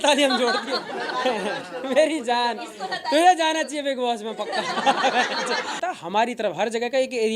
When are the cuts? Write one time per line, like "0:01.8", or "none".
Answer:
0:05.8